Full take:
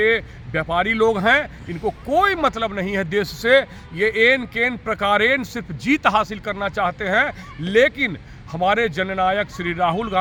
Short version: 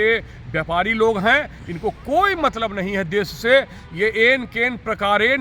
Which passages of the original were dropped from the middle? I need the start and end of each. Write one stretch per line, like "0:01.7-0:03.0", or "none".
none